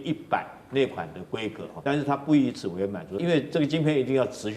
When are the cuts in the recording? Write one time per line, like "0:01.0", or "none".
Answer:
0:01.7
0:03.2